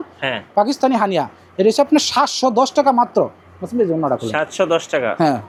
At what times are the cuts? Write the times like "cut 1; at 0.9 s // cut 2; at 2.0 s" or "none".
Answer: none